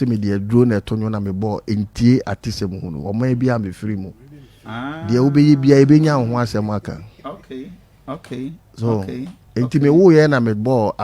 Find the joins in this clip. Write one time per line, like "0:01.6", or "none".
none